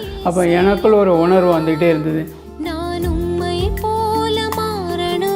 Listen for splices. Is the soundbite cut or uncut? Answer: uncut